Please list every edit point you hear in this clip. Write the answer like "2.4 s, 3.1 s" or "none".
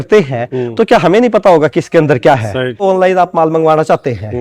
2.8 s